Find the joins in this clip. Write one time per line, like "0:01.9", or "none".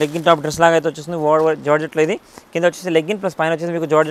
none